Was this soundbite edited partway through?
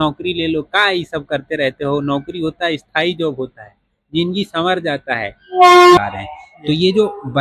yes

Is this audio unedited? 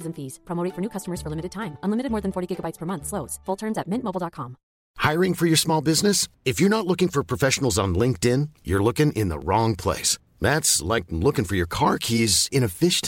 no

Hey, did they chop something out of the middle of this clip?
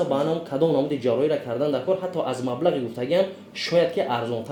no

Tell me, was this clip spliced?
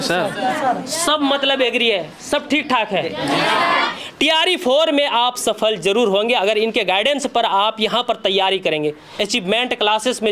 yes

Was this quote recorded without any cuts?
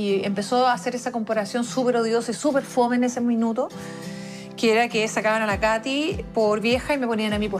yes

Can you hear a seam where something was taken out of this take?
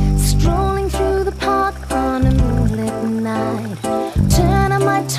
yes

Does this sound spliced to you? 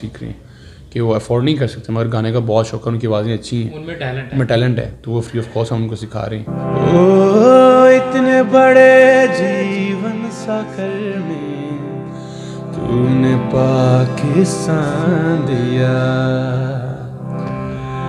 yes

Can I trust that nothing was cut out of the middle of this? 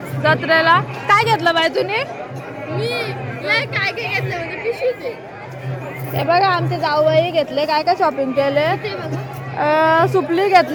yes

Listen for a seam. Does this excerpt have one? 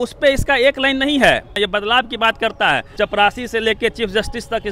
yes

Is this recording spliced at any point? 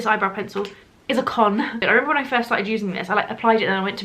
yes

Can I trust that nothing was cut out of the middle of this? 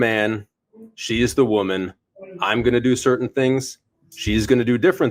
yes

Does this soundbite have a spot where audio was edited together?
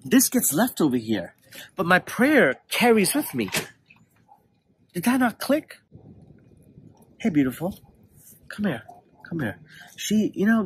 no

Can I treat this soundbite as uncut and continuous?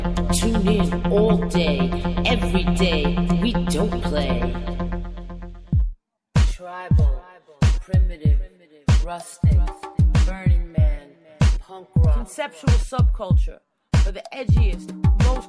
no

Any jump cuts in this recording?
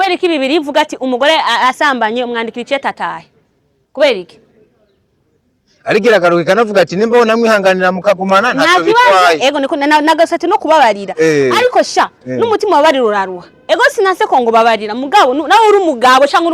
no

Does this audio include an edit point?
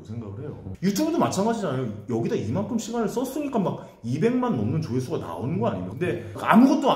yes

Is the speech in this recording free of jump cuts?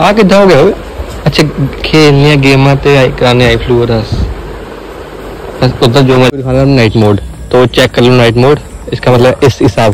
no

